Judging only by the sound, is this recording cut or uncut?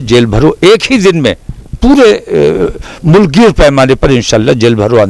uncut